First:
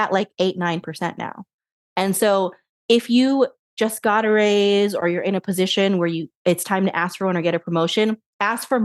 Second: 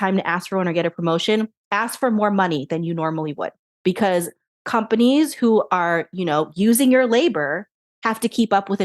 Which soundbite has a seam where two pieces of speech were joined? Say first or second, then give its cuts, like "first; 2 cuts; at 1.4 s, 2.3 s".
second; 1 cut; at 3.7 s